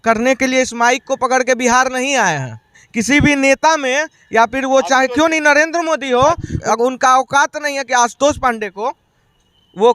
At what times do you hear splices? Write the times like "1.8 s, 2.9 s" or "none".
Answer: 2.8 s, 6.5 s